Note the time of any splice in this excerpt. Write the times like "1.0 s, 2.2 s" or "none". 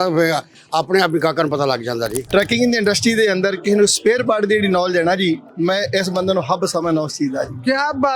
2.2 s